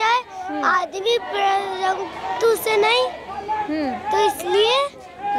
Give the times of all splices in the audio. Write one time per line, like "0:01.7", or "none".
none